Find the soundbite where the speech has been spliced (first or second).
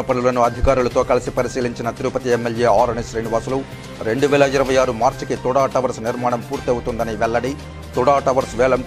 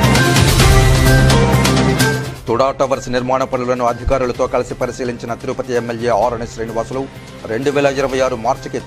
second